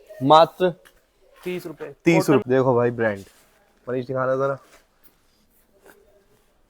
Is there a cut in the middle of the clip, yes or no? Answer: yes